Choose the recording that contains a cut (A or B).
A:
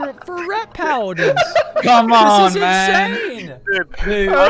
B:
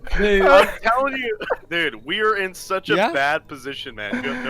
B